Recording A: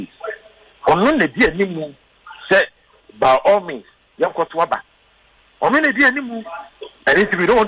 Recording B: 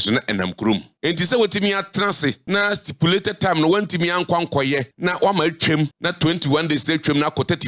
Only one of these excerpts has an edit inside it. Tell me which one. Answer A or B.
B